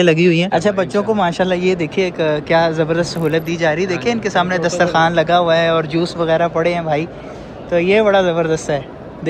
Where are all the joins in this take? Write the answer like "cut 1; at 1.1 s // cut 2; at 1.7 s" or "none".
none